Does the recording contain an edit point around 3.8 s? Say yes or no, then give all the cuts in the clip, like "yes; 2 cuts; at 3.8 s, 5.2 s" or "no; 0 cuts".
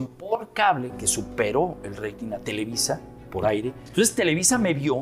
yes; 1 cut; at 3.8 s